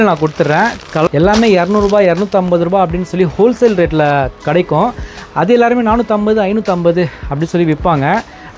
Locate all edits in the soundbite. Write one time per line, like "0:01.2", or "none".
0:01.1